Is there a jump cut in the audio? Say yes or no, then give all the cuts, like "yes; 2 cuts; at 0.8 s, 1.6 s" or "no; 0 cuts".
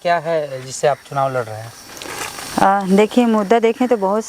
no; 0 cuts